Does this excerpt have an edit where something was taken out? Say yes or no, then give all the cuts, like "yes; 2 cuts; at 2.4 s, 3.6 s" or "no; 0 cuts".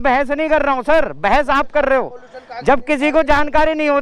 no; 0 cuts